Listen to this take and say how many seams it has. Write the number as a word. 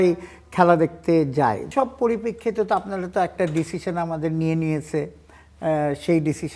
one